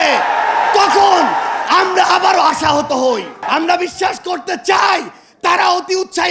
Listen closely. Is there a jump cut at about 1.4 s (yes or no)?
no